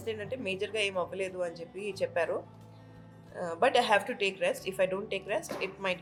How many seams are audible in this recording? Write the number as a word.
zero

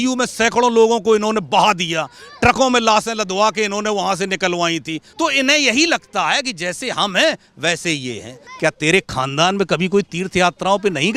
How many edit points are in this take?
two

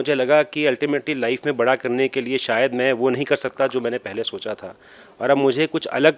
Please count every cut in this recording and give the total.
zero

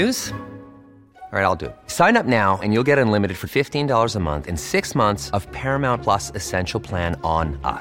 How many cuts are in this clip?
zero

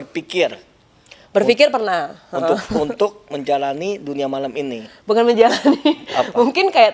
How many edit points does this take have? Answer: zero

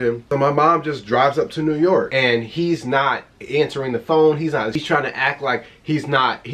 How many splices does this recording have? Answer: two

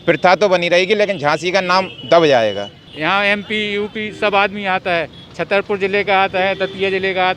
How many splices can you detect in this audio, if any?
one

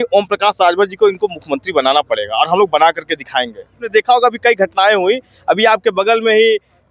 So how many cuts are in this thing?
one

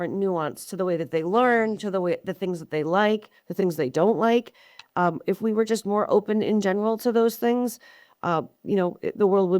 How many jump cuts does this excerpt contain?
zero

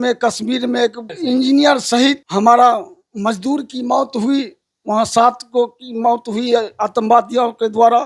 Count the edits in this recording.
two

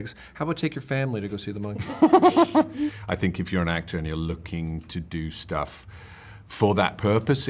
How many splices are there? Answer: one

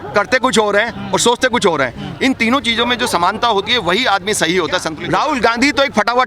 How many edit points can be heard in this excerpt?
one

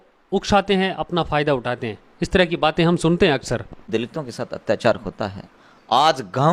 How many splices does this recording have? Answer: one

